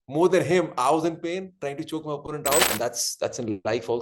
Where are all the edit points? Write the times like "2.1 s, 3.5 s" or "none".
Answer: 2.7 s